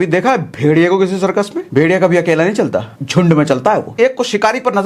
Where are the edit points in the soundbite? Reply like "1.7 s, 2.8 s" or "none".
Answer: 1.6 s, 2.9 s, 3.9 s